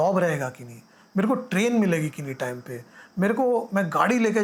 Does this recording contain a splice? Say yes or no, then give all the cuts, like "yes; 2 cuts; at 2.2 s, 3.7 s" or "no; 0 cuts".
no; 0 cuts